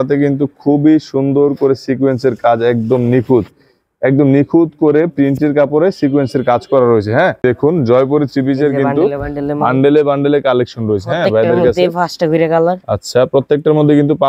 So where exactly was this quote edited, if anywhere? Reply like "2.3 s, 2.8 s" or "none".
7.4 s